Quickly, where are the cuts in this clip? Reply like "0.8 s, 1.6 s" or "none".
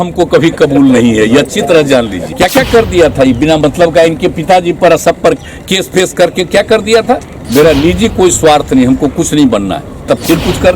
2.2 s, 7.3 s, 10.1 s